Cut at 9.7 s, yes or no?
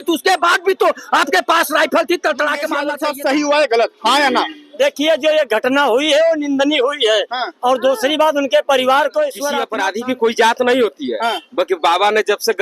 yes